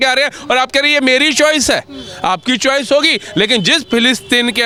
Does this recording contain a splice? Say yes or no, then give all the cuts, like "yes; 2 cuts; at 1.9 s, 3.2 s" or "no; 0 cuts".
no; 0 cuts